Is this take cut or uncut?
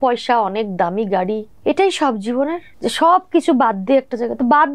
cut